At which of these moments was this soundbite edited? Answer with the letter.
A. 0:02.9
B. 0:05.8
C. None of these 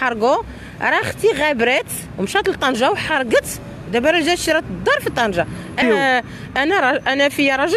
B